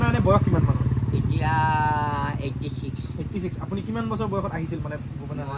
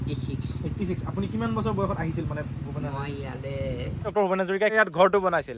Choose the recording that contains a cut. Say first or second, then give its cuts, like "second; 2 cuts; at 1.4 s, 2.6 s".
second; 1 cut; at 4.0 s